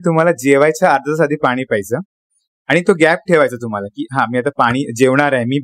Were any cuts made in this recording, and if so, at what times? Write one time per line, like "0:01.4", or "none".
none